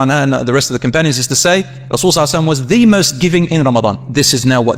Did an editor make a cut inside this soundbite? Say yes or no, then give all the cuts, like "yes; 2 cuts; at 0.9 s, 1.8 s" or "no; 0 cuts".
no; 0 cuts